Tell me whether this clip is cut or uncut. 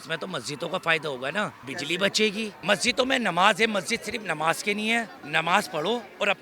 cut